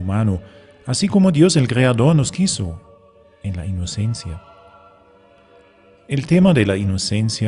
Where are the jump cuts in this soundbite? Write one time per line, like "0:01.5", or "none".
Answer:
none